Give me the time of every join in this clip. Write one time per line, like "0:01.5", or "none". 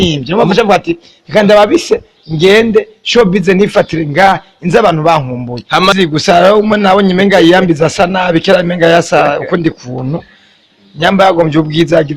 0:05.9